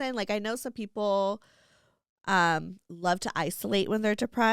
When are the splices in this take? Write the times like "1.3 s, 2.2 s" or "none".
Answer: none